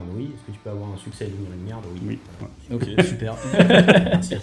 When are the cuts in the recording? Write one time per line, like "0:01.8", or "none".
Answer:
0:03.4